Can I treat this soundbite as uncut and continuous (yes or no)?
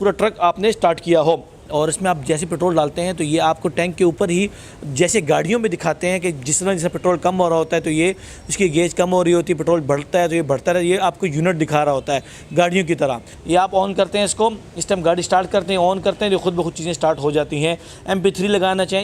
no